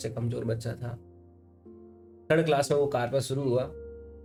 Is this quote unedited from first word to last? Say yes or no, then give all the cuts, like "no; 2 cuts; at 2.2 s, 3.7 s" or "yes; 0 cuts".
yes; 0 cuts